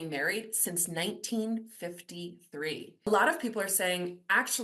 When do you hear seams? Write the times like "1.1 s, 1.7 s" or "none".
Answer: 3.1 s